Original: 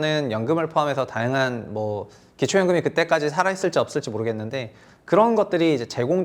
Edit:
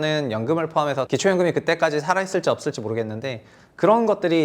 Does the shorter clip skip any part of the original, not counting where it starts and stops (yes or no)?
yes